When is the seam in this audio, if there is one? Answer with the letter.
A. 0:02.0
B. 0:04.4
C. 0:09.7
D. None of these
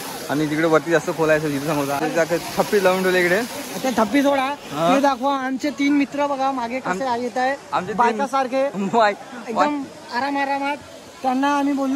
A